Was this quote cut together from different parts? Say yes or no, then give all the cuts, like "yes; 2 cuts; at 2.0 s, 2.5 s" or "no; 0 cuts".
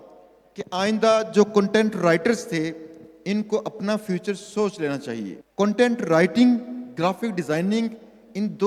yes; 1 cut; at 5.4 s